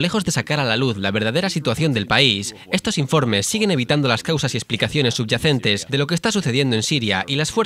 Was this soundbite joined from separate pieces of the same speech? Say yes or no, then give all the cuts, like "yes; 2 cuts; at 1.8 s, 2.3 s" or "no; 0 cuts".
yes; 1 cut; at 2.8 s